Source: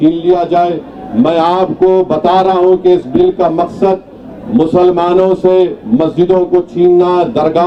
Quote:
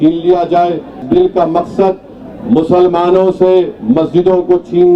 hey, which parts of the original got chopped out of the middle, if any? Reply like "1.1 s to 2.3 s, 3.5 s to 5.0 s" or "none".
1.0 s to 3.1 s